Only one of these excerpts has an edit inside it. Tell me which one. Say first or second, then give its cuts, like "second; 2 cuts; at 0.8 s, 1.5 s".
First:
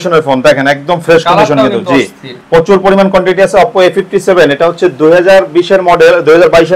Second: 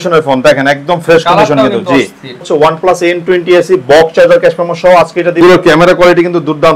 second; 2 cuts; at 2.5 s, 5.4 s